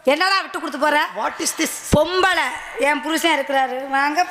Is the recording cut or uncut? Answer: uncut